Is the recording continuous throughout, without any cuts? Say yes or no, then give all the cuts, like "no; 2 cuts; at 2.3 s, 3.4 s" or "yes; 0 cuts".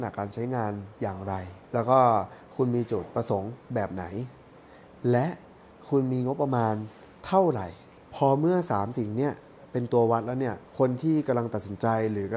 no; 3 cuts; at 1.5 s, 8.0 s, 10.6 s